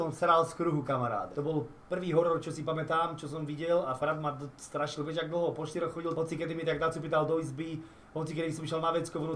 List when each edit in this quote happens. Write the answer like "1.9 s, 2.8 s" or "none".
1.3 s